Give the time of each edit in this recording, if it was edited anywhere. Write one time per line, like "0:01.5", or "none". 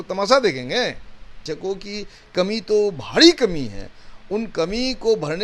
0:01.3